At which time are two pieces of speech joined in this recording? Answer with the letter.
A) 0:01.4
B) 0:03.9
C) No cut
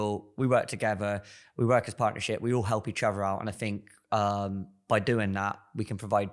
C